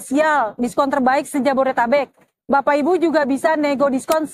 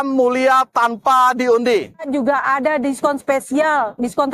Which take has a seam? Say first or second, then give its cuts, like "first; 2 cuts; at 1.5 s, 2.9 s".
second; 1 cut; at 2.1 s